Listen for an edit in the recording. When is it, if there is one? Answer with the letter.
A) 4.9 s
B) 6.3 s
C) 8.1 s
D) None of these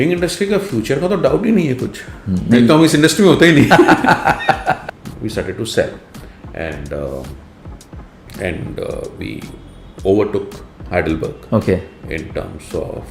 A